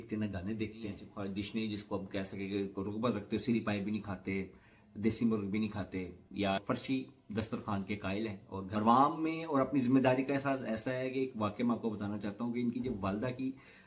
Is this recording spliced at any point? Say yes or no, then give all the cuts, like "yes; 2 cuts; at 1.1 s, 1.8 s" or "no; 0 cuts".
yes; 3 cuts; at 1.1 s, 6.6 s, 8.7 s